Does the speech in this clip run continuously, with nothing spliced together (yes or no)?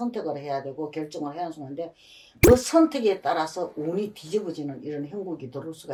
yes